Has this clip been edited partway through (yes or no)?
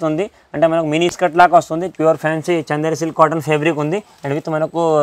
yes